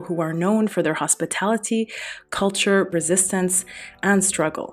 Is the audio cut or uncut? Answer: cut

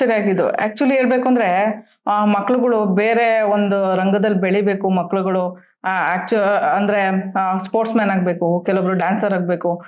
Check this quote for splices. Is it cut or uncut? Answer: uncut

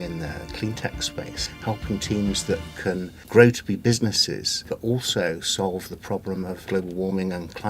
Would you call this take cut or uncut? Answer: cut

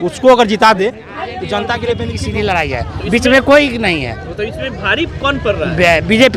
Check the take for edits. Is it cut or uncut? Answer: cut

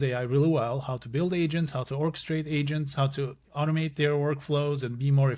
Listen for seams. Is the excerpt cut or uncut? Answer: uncut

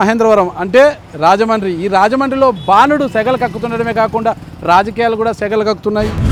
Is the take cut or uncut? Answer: uncut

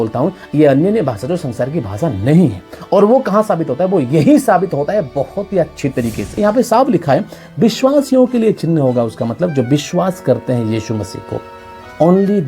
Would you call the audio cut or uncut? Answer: cut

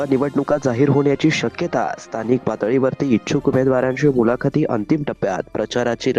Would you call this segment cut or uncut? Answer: uncut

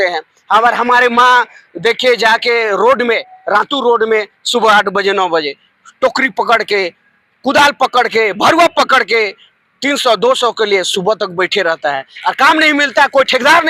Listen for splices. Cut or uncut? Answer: uncut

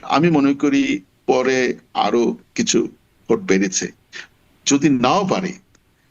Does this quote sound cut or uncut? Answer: uncut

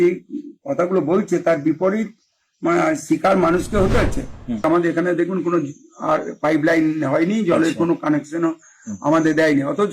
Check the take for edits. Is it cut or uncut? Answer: cut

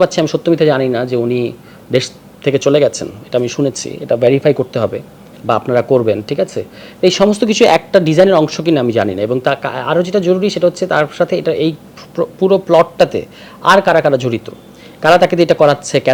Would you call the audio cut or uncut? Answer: uncut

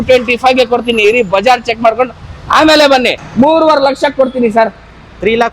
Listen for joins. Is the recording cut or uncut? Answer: cut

